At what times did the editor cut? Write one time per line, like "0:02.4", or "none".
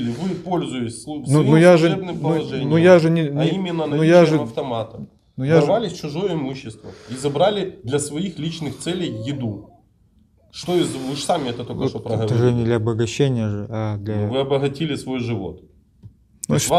none